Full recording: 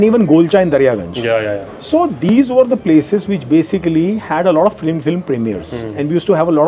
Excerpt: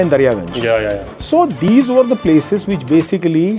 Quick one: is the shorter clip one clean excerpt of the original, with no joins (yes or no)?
yes